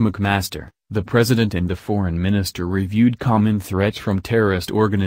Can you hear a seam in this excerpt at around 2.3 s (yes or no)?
no